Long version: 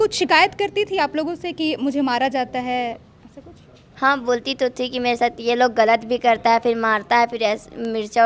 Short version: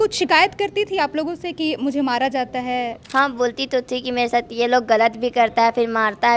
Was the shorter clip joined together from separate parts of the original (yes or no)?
yes